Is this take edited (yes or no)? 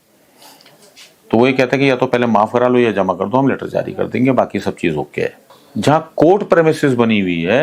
yes